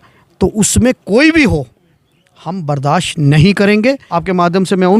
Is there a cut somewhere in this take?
yes; 1 cut; at 4.0 s

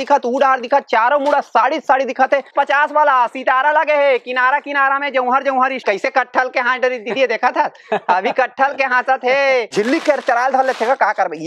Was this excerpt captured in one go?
no; 3 cuts; at 2.5 s, 5.8 s, 9.7 s

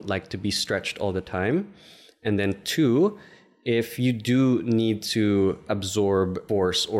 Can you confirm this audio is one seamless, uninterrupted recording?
no; 1 cut; at 6.0 s

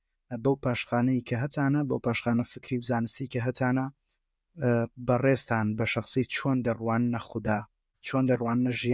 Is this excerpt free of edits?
no; 1 cut; at 7.9 s

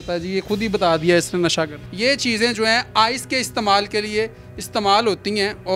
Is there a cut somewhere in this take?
yes; 1 cut; at 1.8 s

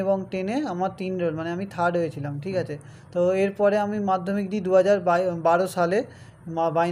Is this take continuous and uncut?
yes; 0 cuts

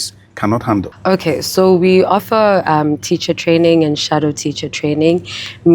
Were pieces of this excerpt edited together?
yes; 1 cut; at 0.9 s

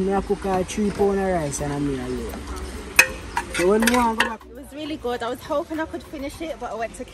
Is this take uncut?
no; 1 cut; at 4.5 s

